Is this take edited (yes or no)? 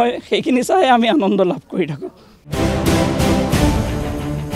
yes